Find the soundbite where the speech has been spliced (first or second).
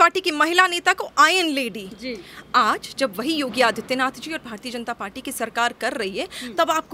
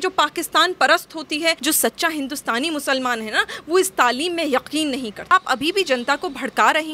second